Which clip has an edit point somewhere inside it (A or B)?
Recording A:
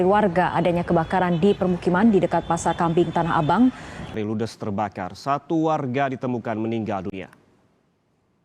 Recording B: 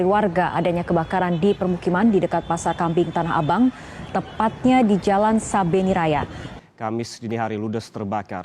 A